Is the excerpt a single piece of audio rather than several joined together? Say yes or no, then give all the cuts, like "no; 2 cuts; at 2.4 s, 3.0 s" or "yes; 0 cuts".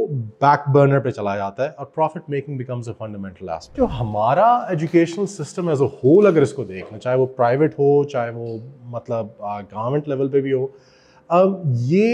no; 1 cut; at 3.8 s